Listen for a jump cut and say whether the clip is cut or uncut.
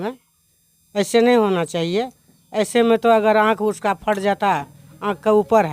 uncut